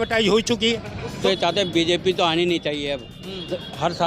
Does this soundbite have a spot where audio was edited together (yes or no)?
yes